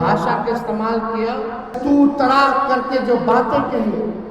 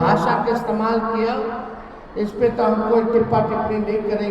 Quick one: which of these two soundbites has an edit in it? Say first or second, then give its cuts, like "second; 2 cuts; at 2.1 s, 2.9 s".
first; 1 cut; at 1.8 s